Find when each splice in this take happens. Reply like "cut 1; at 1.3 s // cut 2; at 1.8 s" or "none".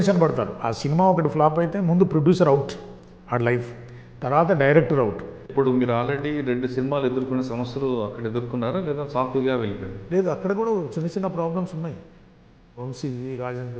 cut 1; at 5.5 s // cut 2; at 9.9 s